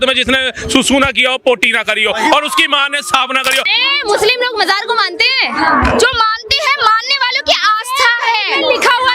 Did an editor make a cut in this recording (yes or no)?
yes